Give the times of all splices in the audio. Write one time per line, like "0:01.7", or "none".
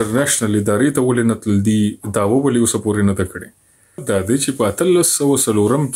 0:04.0